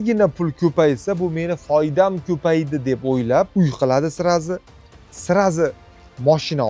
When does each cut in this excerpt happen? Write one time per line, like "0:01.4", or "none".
0:03.5